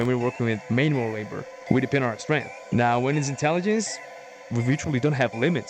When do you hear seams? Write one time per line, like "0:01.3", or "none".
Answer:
0:02.5